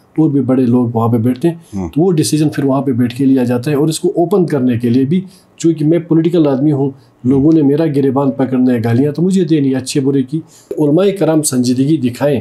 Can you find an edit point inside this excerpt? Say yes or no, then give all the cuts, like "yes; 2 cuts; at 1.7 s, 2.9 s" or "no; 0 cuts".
yes; 1 cut; at 10.7 s